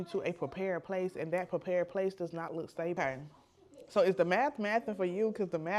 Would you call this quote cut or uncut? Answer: cut